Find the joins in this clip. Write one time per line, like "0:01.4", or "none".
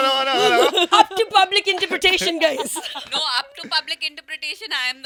none